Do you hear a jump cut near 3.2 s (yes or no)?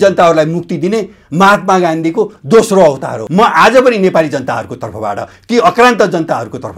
yes